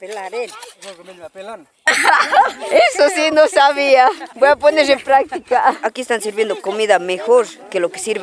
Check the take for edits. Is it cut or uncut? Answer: cut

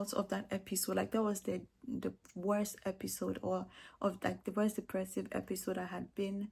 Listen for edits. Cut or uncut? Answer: uncut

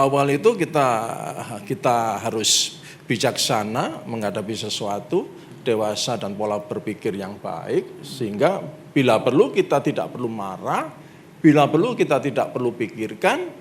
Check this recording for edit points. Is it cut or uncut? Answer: uncut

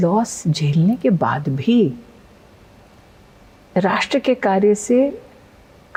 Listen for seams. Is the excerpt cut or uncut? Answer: uncut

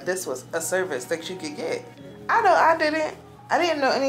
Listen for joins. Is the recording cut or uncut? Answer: uncut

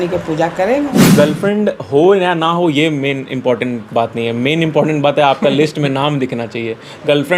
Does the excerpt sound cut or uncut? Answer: cut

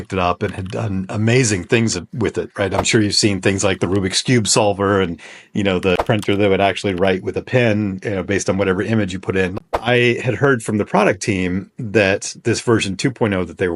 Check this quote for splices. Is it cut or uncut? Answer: cut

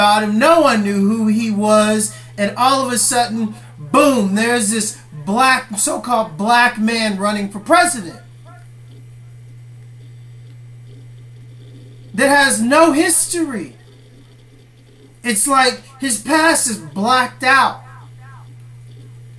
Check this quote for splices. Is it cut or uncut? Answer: uncut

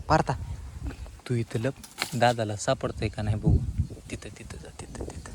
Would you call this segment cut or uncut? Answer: uncut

